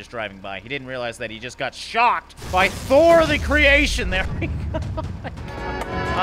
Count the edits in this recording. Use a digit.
0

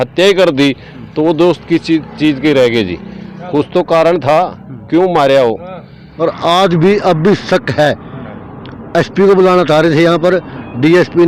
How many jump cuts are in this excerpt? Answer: 1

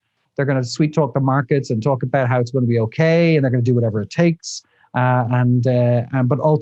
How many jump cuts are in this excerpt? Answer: 0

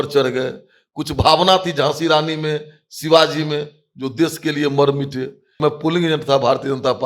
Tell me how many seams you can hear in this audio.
1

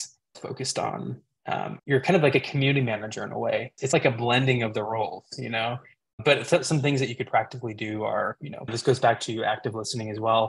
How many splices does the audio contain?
3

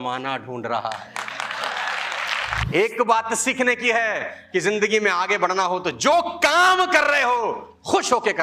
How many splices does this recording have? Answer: 1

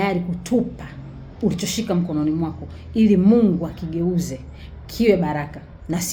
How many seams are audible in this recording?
0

